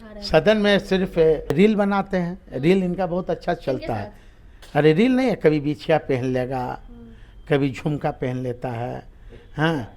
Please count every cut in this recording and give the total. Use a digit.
1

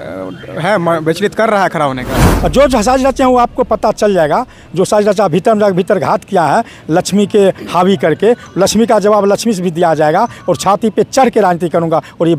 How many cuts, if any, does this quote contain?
1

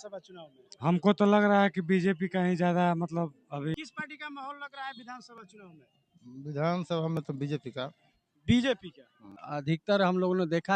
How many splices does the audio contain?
2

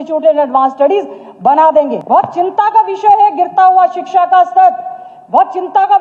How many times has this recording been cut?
1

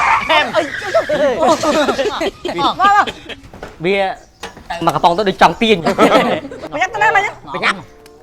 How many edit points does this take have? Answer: 1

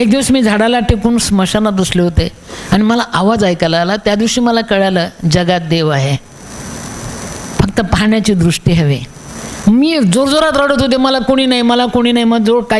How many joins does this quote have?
0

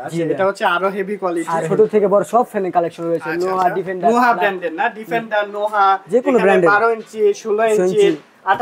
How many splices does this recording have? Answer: 1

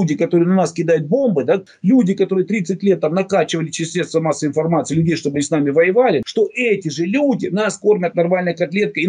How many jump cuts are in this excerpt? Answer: 2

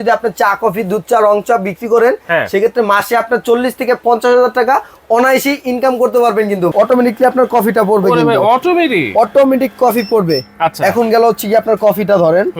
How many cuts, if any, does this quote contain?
1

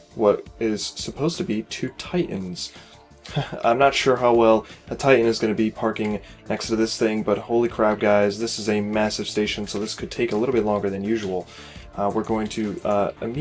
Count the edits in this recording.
1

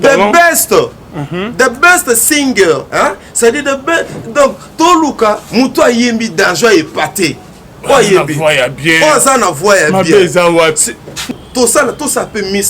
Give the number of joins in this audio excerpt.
1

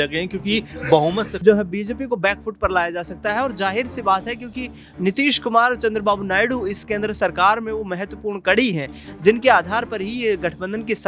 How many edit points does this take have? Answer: 1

